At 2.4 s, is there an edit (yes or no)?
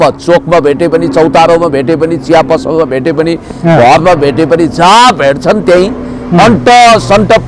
no